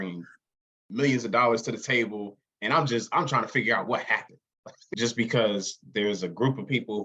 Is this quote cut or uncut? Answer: cut